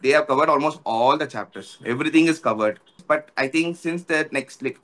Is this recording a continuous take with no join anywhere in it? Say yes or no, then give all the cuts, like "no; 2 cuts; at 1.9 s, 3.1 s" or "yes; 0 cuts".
no; 1 cut; at 3.0 s